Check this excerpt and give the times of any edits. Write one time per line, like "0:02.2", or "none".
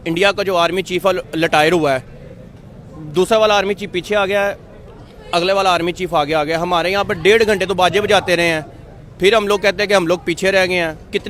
none